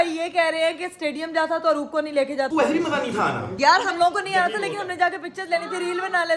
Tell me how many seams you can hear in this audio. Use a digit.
2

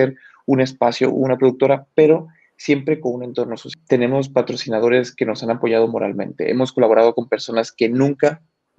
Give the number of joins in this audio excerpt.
1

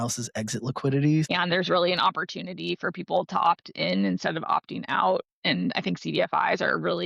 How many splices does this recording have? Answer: 1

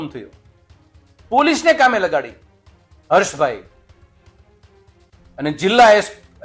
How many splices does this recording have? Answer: 0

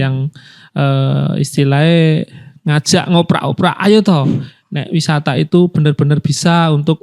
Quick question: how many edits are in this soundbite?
0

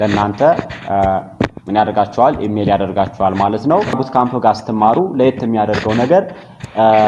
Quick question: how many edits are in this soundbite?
1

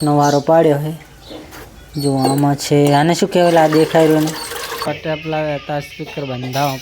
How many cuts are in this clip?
1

